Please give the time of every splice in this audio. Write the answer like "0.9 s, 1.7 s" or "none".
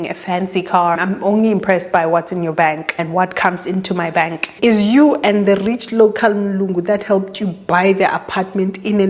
1.0 s, 2.9 s, 4.5 s